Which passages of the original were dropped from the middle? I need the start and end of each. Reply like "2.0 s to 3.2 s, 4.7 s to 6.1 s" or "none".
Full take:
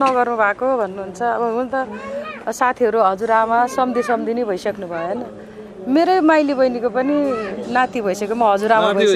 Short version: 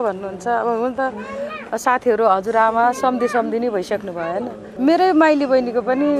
5.4 s to 5.7 s